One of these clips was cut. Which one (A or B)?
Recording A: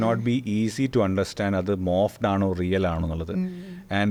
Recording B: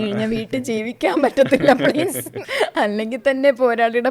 B